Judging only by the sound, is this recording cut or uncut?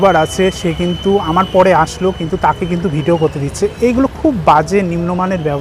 uncut